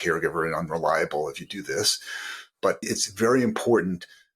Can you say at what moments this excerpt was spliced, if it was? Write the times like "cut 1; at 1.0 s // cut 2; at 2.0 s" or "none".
cut 1; at 3.0 s

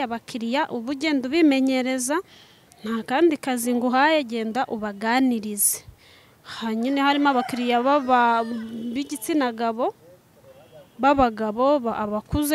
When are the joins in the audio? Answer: none

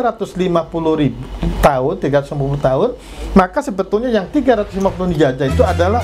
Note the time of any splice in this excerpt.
none

